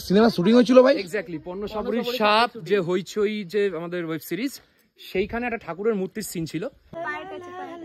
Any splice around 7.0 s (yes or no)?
yes